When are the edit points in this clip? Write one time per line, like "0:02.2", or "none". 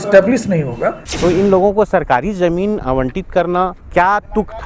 0:01.0
0:03.8